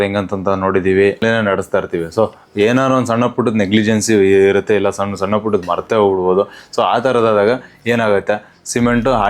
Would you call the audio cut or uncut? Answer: cut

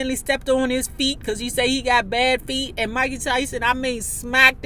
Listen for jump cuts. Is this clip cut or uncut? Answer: uncut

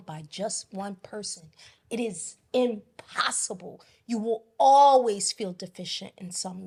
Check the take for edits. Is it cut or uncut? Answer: uncut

